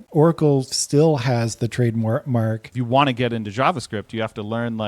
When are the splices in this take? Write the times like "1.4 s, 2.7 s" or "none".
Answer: 2.7 s